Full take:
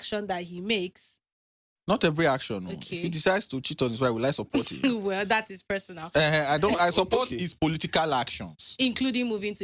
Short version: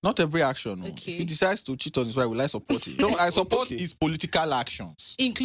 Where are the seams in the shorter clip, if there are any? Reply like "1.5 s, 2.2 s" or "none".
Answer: 3.0 s